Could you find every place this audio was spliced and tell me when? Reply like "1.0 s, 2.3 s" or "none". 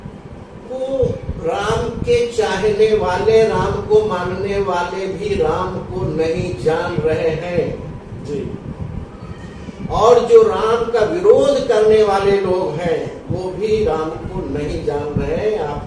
none

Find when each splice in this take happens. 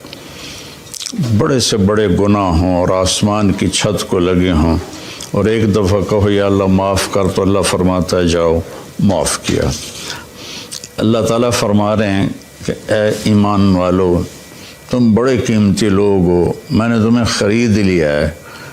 10.3 s

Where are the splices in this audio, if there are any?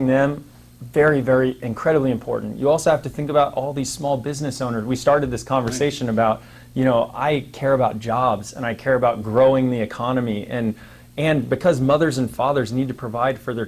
none

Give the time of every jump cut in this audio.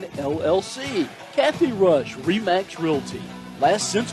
1.2 s

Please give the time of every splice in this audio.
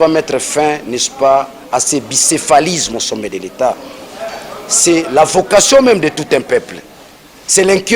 none

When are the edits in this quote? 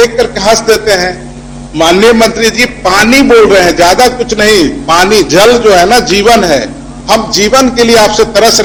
none

